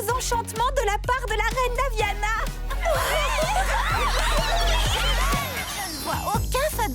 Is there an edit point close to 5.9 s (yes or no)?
yes